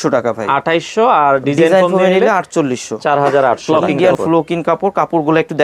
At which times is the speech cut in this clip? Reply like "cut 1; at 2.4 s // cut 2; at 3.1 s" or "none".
cut 1; at 4.0 s